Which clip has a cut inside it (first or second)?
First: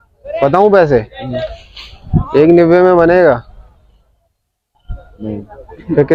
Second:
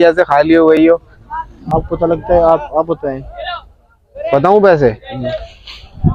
second